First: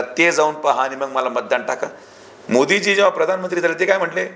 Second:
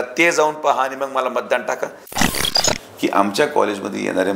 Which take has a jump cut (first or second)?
second